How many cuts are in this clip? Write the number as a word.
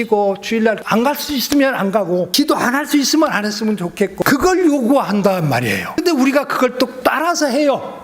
five